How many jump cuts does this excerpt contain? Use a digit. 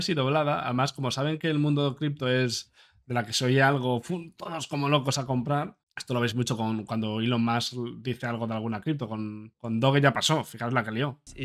0